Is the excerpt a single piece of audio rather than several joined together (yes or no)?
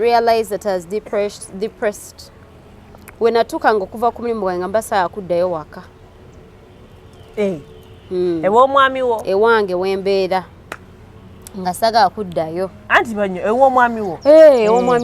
yes